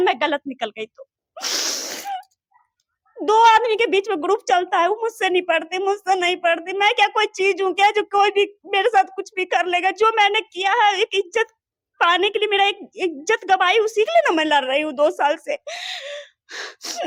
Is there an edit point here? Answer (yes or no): no